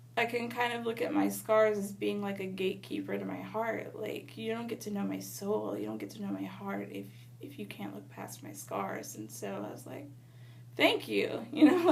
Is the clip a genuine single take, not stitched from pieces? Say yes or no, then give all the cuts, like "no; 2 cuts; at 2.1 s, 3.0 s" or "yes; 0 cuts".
yes; 0 cuts